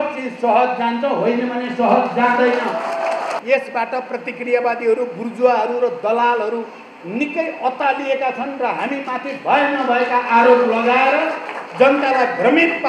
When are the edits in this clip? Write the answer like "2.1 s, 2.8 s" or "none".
3.4 s